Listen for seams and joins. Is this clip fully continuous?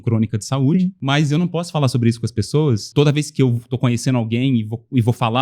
no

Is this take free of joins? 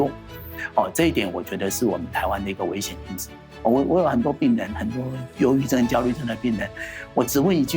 no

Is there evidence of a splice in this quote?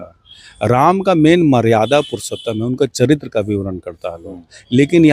no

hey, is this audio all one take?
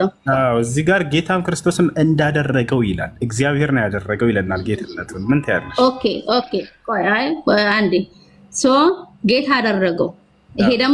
yes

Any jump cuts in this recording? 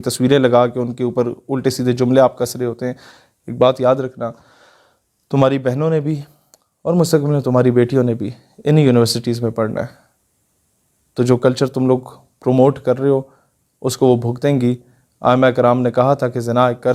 no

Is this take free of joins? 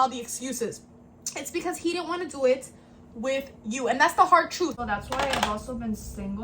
no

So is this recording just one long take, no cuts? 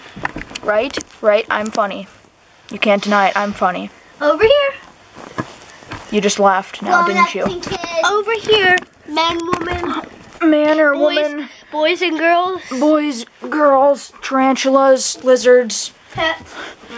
yes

